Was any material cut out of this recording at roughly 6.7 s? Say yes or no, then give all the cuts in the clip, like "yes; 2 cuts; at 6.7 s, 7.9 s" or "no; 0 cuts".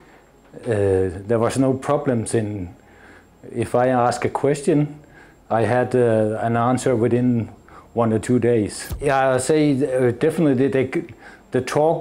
no; 1 cut; at 8.8 s